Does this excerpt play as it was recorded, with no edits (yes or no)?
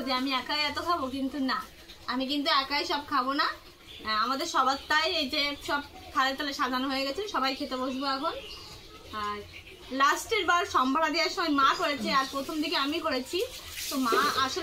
yes